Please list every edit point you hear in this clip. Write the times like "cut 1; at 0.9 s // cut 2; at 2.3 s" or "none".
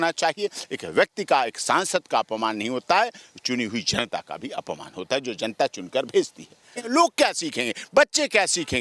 cut 1; at 6.8 s